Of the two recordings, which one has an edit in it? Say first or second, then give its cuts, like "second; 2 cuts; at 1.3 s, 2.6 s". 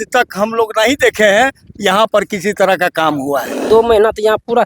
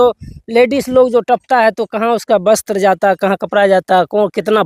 first; 1 cut; at 3.7 s